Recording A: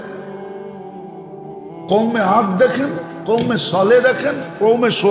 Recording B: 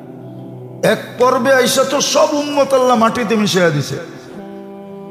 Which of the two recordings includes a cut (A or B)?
B